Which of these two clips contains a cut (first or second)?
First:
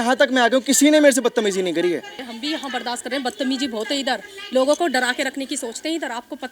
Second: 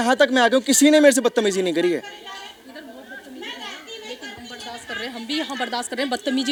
first